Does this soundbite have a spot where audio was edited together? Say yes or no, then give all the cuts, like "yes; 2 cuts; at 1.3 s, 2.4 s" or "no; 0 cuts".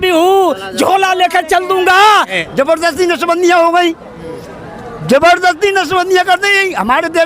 yes; 1 cut; at 2.4 s